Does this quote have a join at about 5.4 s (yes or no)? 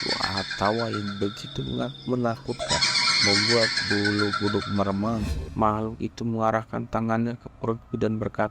yes